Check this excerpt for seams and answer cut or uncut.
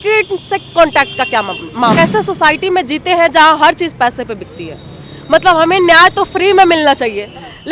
cut